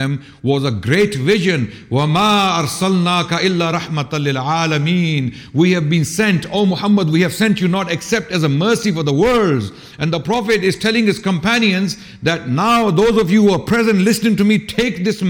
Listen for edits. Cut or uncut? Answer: uncut